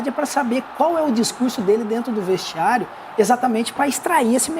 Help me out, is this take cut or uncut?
uncut